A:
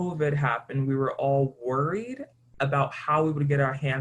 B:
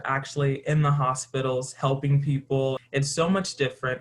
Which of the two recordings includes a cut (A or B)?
B